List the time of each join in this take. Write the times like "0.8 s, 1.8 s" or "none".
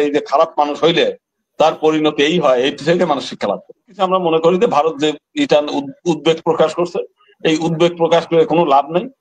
4.0 s